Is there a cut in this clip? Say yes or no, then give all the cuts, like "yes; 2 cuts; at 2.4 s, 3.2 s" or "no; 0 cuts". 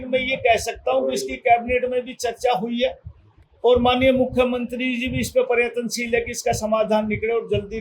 no; 0 cuts